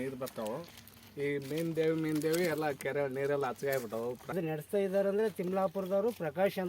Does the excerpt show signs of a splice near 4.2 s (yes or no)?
yes